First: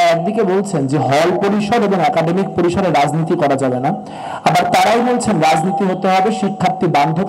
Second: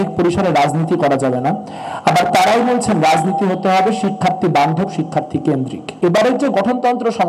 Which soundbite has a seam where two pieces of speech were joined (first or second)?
second